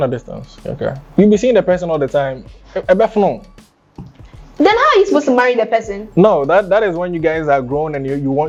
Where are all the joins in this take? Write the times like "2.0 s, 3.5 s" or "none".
none